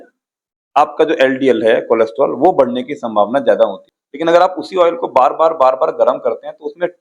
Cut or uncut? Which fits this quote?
cut